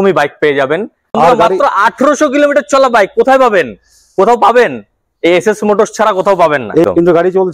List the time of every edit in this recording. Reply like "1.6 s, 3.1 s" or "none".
1.2 s, 6.8 s